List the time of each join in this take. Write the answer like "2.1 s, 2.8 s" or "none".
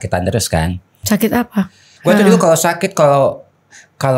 1.0 s, 1.8 s